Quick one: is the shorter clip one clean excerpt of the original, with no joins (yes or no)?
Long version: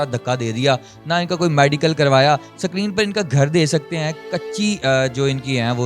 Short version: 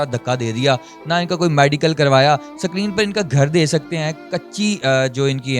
yes